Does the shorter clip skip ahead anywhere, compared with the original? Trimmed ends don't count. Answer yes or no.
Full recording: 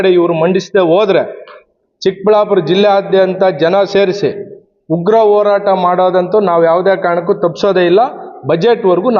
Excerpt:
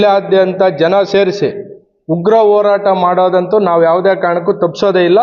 no